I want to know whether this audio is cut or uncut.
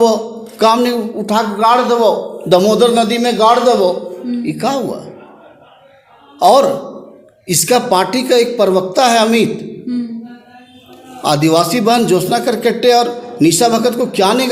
uncut